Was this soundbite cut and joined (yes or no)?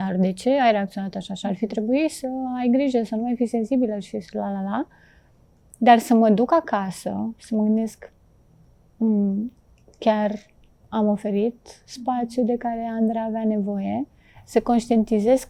no